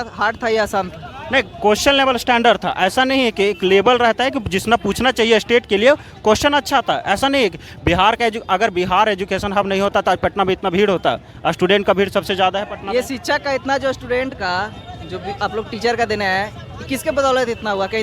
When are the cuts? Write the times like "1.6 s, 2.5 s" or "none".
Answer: none